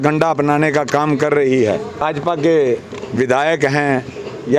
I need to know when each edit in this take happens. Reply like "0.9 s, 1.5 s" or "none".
2.0 s

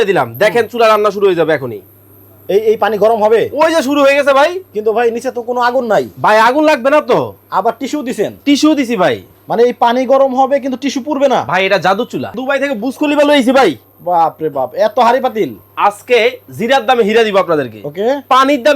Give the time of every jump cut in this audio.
12.4 s

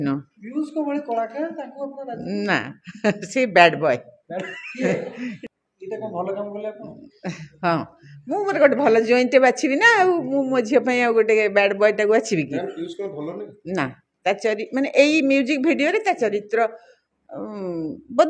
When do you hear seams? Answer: 5.4 s

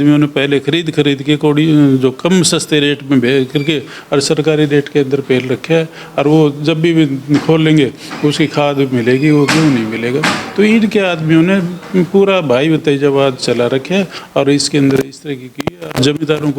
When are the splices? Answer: none

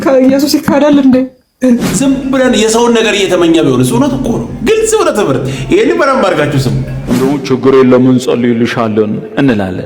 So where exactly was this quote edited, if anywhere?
1.8 s, 7.1 s

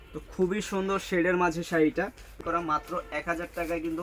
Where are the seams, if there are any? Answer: 2.4 s

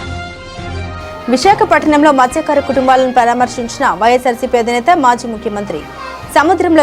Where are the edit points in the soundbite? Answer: 0.9 s

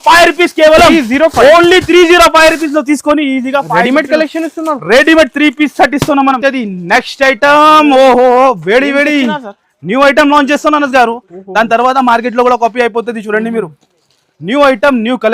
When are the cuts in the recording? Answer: 6.4 s

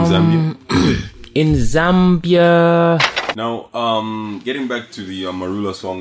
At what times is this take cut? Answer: 3.2 s

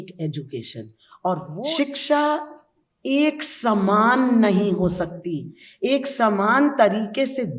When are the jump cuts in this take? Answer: 1.5 s

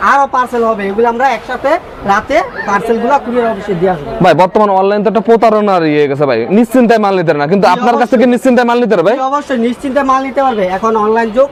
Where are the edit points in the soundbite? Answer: none

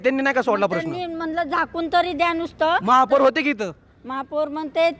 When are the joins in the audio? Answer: none

